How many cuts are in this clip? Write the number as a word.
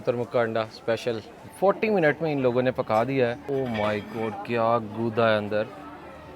two